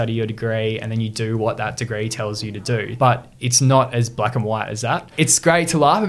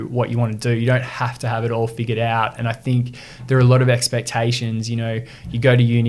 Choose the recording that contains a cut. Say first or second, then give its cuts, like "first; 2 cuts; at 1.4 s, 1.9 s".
first; 2 cuts; at 2.9 s, 5.1 s